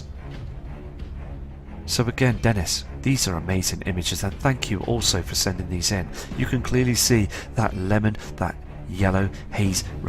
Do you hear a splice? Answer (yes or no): yes